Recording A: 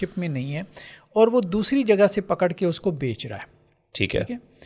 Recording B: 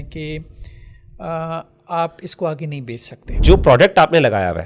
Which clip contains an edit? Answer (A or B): B